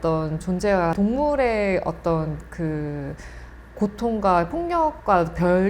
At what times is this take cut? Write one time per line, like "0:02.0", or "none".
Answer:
0:00.9